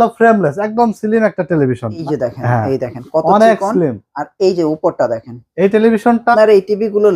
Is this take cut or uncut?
cut